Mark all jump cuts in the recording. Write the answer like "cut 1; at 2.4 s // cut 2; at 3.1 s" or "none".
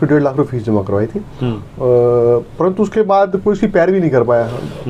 none